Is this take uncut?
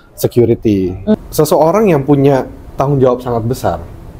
no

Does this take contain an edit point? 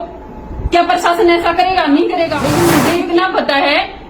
yes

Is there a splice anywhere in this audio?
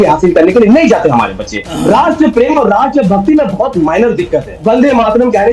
yes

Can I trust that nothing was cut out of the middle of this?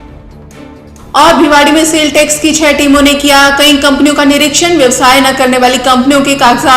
no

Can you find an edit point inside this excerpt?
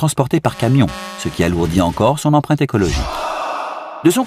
yes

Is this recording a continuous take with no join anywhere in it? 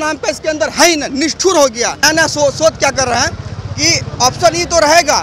no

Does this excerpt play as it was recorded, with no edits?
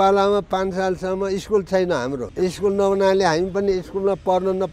no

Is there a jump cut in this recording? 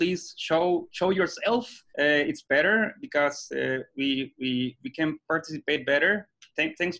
yes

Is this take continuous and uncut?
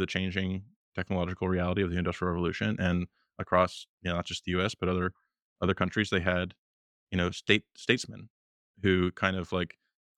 yes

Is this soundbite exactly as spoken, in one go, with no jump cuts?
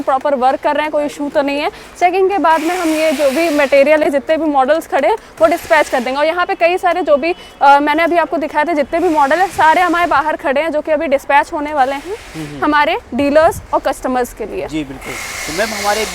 yes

